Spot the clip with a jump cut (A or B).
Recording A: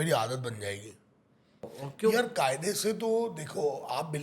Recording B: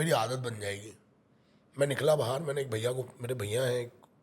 A